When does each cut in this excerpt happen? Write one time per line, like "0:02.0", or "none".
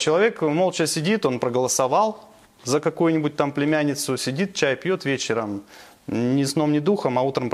none